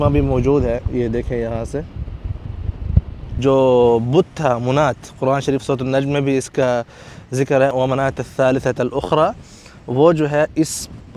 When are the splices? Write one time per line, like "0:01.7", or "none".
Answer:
0:03.3